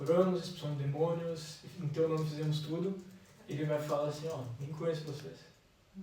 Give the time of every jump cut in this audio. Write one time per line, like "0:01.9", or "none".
none